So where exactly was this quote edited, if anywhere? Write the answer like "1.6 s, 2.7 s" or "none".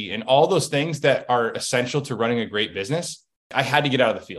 3.5 s